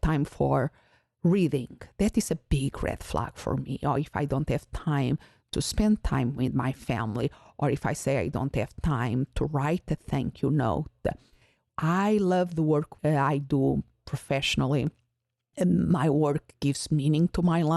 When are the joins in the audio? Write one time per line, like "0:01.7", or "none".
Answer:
0:11.6